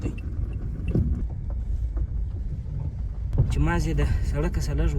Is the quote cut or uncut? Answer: cut